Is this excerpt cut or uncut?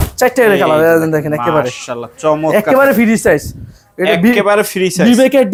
uncut